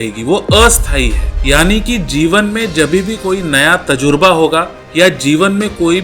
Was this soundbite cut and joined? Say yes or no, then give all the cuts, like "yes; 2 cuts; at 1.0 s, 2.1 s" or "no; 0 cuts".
yes; 2 cuts; at 1.3 s, 4.8 s